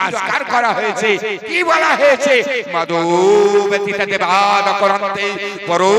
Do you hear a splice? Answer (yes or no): no